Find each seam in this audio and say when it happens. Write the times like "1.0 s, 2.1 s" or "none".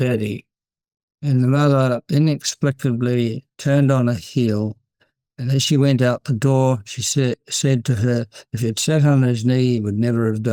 none